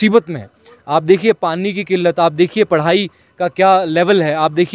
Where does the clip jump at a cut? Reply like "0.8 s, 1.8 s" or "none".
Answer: none